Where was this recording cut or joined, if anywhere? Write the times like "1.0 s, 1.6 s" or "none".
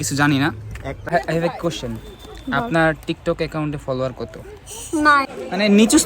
1.1 s, 5.3 s